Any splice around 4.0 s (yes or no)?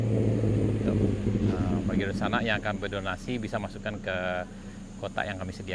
no